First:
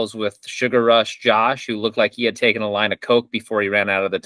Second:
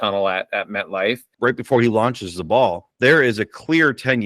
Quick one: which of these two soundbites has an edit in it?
second; 1 cut; at 1.3 s

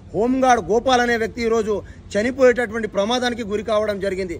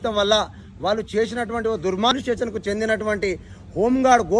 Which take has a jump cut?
second; 1 cut; at 2.1 s

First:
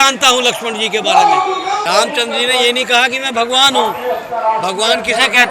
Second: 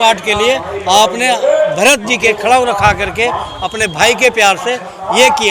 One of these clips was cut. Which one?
first; 1 cut; at 1.8 s

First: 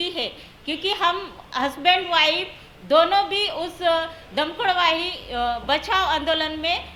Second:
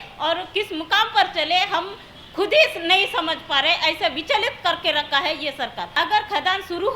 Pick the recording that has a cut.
second; 1 cut; at 6.0 s

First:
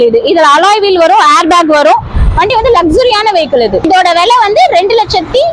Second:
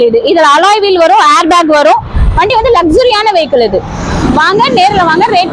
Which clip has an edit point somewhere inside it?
first; 1 cut; at 3.8 s

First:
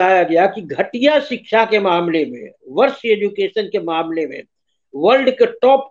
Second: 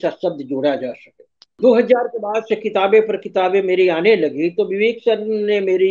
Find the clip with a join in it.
second; 1 cut; at 1.6 s

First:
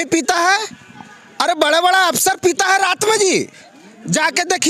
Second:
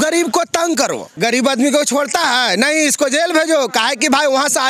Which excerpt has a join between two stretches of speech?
second; 1 cut; at 1.0 s

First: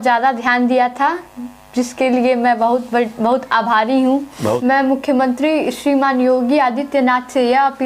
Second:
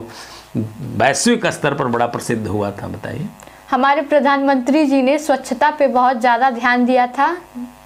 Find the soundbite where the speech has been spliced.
first; 1 cut; at 4.6 s

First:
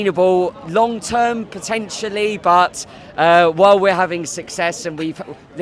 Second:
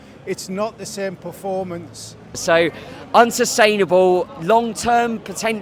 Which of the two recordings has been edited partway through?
second; 1 cut; at 2.3 s

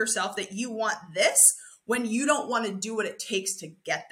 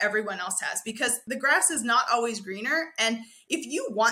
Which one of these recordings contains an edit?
second; 1 cut; at 1.2 s

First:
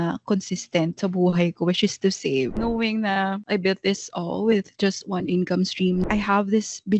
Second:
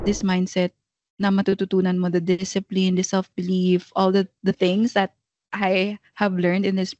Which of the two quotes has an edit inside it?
first; 3 cuts; at 2.5 s, 3.4 s, 6.0 s

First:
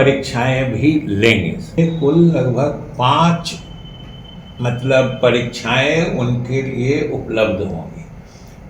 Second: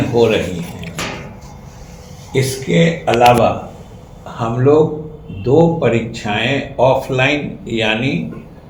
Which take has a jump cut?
first; 1 cut; at 1.7 s

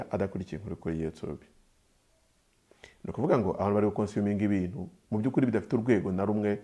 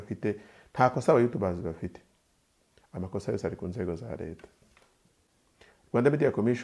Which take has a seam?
second; 1 cut; at 5.3 s

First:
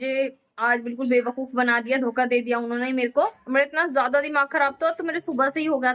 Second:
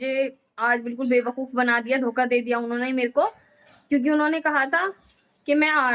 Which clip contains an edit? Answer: first; 1 cut; at 3.4 s

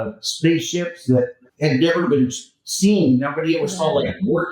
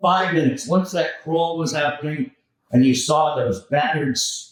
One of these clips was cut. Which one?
first; 1 cut; at 1.4 s

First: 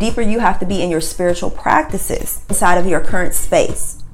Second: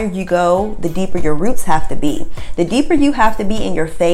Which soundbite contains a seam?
first; 1 cut; at 2.6 s

